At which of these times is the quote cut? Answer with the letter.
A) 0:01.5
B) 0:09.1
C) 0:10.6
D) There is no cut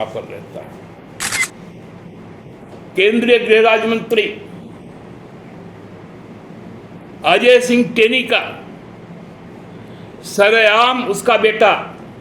A